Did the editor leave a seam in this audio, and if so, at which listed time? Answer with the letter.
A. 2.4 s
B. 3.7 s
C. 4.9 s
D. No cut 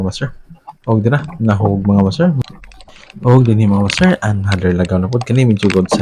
A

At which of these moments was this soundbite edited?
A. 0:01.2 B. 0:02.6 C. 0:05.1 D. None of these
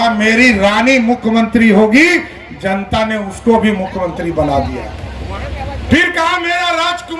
D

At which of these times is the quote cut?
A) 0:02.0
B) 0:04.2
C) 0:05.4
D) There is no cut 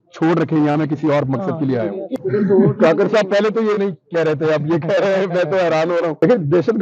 A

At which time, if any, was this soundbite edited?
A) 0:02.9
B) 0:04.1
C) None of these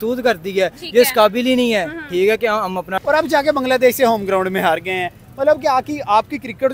A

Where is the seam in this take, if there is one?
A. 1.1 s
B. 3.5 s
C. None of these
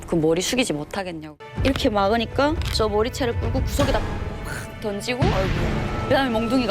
A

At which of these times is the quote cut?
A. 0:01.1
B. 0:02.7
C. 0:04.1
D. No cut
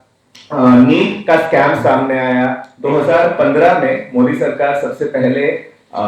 B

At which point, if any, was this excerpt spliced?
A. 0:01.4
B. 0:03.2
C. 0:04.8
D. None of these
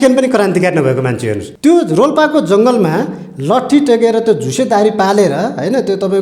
A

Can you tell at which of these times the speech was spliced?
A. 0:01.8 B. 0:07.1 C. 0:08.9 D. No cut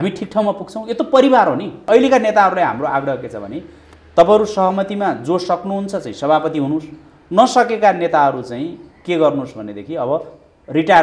A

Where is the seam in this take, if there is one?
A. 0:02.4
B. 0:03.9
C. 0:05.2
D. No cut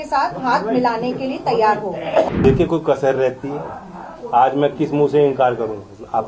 A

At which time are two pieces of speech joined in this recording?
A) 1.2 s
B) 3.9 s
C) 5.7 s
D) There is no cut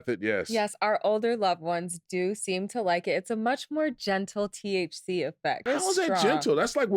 C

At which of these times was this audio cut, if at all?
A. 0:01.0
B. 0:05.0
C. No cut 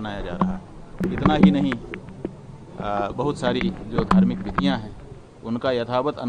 A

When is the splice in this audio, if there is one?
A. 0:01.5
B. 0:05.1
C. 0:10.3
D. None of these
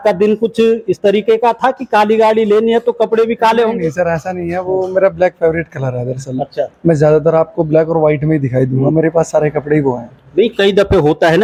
D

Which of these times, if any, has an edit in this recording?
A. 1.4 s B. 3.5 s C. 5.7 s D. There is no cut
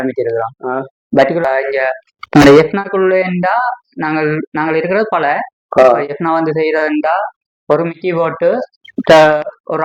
A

